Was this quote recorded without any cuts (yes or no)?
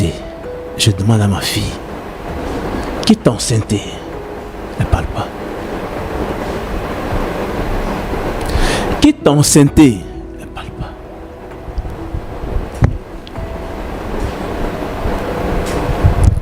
yes